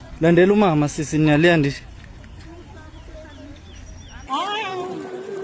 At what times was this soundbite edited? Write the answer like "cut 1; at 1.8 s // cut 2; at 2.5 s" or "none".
cut 1; at 4.1 s